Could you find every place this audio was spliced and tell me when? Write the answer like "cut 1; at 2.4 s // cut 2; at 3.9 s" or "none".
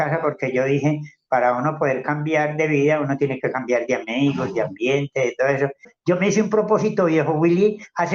cut 1; at 5.9 s